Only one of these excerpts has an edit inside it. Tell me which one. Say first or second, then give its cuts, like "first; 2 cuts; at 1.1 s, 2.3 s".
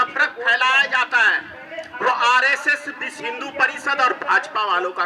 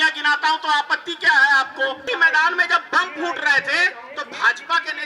second; 2 cuts; at 2.0 s, 4.0 s